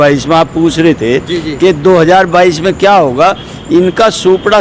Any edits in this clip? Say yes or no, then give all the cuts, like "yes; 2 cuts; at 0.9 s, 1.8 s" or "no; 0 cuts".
no; 0 cuts